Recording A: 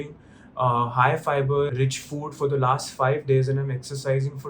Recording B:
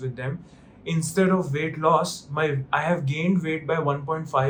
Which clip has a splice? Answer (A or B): A